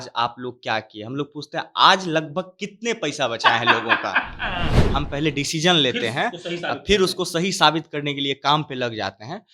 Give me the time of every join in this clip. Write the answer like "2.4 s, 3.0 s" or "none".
4.8 s